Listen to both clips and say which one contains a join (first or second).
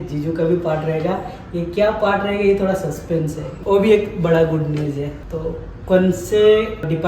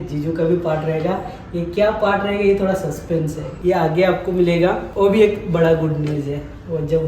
first